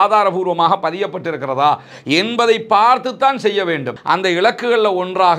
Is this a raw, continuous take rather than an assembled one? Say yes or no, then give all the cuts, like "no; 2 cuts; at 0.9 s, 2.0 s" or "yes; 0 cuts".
no; 1 cut; at 3.9 s